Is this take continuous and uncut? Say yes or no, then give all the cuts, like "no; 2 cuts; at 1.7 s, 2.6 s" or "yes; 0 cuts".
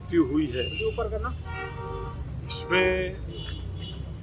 yes; 0 cuts